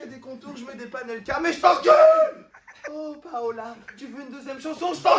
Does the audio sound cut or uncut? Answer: uncut